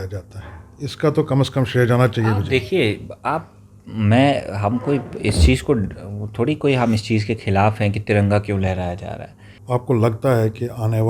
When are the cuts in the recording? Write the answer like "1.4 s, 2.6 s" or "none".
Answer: 9.5 s